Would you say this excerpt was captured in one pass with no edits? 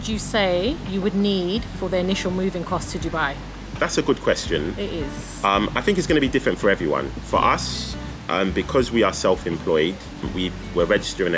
yes; 0 cuts

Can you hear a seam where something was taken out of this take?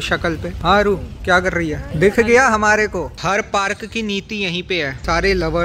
yes; 1 cut; at 3.1 s

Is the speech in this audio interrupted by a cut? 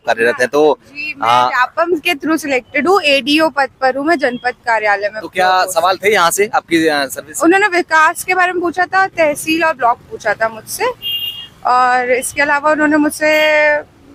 no; 0 cuts

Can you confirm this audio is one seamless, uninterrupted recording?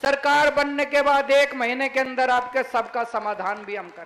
yes; 0 cuts

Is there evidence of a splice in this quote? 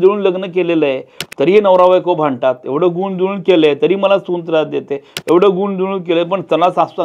no; 0 cuts

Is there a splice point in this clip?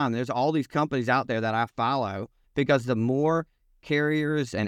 yes; 1 cut; at 2.4 s

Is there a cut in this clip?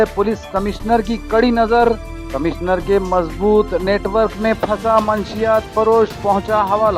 no; 0 cuts

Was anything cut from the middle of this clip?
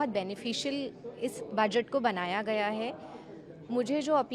no; 0 cuts

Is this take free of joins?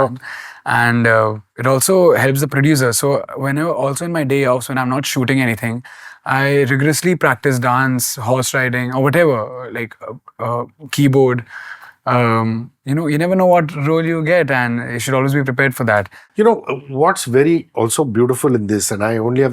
no; 1 cut; at 16.2 s

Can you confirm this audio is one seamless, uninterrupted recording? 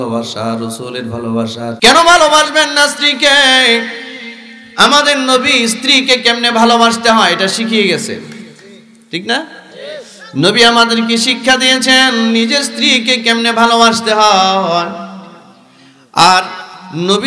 no; 1 cut; at 1.8 s

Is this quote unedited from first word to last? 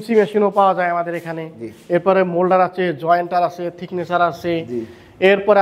yes; 0 cuts

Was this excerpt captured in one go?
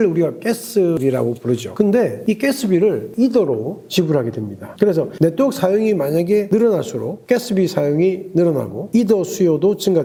yes; 0 cuts

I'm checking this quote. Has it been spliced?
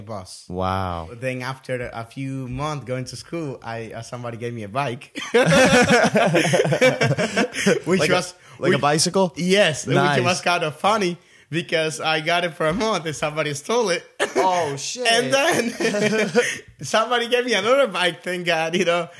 yes; 1 cut; at 1.1 s

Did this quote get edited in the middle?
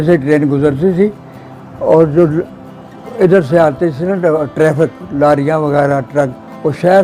no; 0 cuts

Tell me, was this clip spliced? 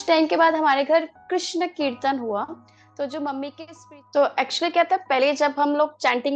yes; 1 cut; at 3.7 s

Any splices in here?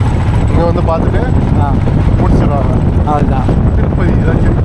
no; 0 cuts

